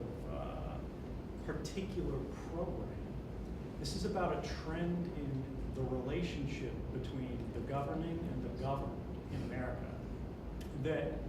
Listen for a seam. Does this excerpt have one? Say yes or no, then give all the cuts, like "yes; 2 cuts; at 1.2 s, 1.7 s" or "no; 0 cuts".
yes; 1 cut; at 4.3 s